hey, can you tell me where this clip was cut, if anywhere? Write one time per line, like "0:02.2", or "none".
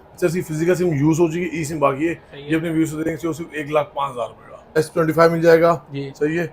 0:04.7